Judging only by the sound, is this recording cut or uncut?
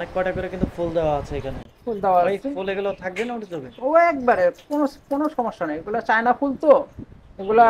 uncut